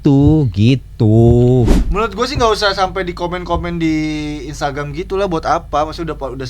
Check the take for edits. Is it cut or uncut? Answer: cut